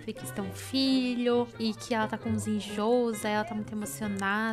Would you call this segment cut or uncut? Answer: uncut